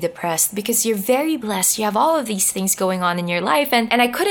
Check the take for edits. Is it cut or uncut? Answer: uncut